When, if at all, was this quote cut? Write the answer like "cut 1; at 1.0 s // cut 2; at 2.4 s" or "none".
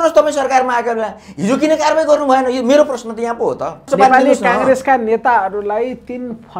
cut 1; at 3.8 s